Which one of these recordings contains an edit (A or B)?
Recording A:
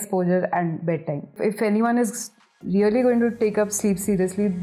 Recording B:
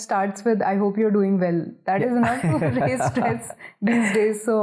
A